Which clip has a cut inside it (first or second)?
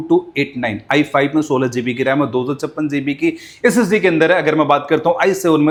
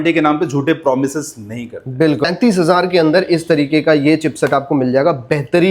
second